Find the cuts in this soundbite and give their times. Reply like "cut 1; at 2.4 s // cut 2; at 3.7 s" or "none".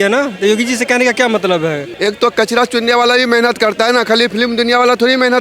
cut 1; at 1.9 s

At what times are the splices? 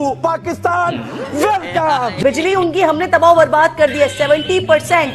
cut 1; at 2.2 s

